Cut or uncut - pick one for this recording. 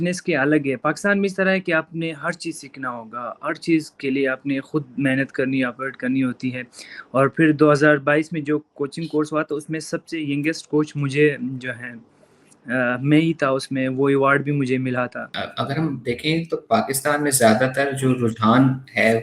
cut